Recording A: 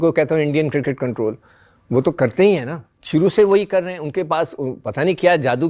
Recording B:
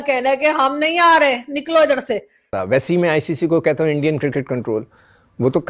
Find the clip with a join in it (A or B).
B